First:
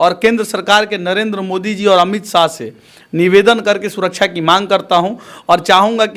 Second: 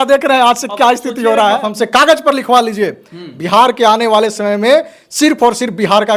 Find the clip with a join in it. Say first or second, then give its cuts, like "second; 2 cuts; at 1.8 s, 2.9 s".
second; 1 cut; at 1.7 s